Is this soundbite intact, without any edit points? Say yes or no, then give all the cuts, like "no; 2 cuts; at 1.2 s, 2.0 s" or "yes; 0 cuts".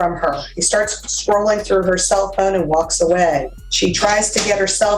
no; 1 cut; at 3.6 s